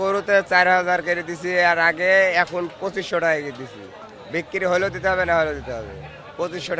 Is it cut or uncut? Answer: uncut